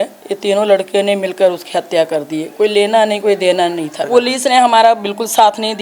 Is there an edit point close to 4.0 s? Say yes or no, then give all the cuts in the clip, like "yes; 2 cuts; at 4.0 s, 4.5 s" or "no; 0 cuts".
yes; 1 cut; at 4.0 s